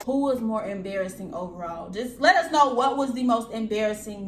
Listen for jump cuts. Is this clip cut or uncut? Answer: uncut